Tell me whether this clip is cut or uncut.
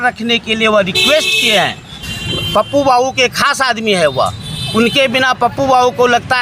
cut